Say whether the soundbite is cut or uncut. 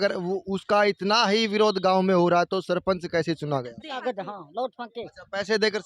cut